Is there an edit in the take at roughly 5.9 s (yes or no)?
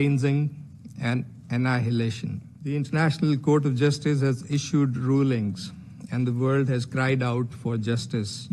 no